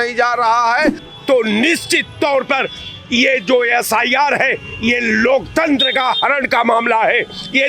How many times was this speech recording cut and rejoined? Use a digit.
1